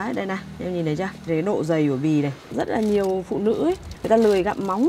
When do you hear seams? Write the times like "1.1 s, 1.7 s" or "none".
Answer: 1.3 s, 2.5 s, 3.9 s